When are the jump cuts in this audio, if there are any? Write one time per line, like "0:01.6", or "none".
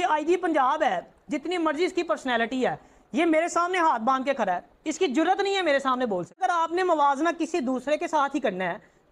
0:06.4